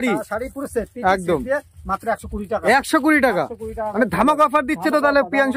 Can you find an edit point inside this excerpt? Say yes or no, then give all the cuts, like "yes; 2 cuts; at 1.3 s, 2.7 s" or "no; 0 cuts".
no; 0 cuts